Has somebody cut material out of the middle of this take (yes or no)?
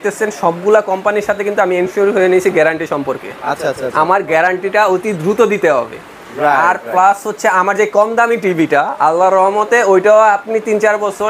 no